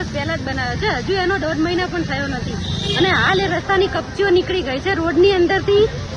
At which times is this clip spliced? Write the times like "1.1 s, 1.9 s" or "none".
none